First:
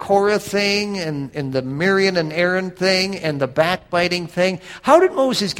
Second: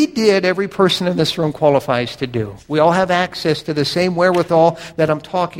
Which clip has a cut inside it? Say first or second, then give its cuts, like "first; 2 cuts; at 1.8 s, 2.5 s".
first; 1 cut; at 1.3 s